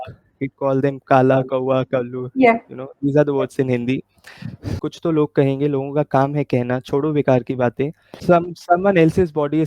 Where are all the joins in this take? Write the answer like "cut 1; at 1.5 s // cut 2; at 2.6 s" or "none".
cut 1; at 4.9 s // cut 2; at 8.2 s